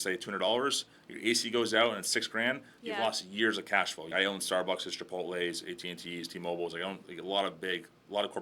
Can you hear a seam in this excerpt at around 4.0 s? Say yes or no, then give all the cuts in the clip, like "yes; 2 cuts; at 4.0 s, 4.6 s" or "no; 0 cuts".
yes; 1 cut; at 4.0 s